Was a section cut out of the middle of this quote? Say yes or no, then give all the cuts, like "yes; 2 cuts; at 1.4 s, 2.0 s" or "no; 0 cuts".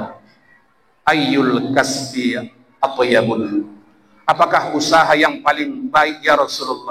no; 0 cuts